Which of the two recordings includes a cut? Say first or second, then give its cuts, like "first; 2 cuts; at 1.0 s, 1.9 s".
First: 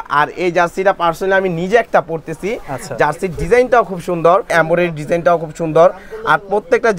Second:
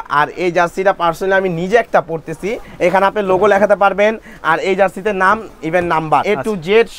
second; 2 cuts; at 2.6 s, 6.2 s